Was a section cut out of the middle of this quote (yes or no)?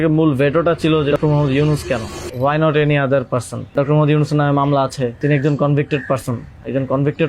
yes